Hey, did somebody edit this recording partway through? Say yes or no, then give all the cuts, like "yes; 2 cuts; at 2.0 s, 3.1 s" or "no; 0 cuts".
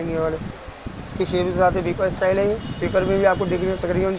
no; 0 cuts